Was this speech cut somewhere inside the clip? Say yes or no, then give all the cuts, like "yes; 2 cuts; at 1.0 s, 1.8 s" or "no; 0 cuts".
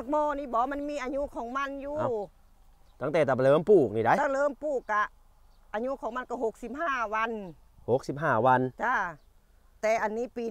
no; 0 cuts